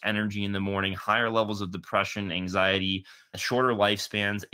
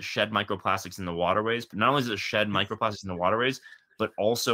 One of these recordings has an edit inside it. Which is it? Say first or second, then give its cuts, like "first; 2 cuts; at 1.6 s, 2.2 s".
second; 1 cut; at 1.7 s